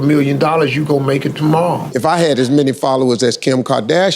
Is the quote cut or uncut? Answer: cut